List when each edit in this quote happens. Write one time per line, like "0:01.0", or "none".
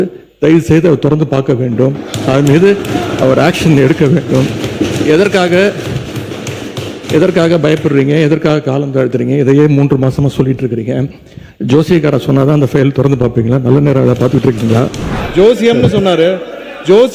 0:15.0